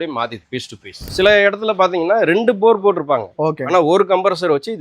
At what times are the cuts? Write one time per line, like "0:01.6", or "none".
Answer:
0:01.0